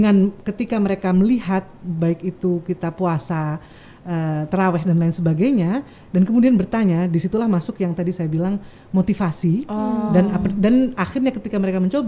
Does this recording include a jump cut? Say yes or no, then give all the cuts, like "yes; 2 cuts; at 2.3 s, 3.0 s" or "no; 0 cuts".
no; 0 cuts